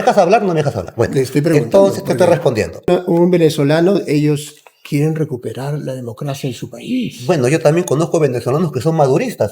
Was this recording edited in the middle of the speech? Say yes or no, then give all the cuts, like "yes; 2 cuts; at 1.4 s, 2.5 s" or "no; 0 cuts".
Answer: yes; 1 cut; at 2.9 s